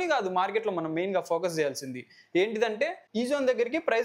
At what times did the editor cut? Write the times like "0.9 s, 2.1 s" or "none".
3.0 s